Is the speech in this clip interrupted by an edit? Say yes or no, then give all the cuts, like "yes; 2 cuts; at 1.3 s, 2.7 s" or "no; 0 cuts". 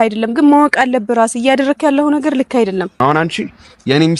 yes; 1 cut; at 2.9 s